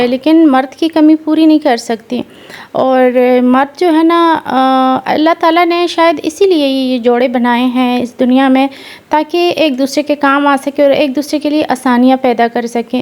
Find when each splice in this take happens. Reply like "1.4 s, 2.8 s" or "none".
none